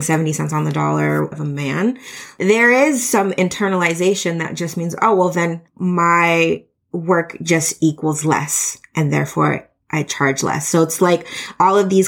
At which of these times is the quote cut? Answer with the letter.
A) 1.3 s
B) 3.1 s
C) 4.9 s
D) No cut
A